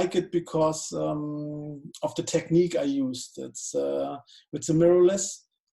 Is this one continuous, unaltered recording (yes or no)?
yes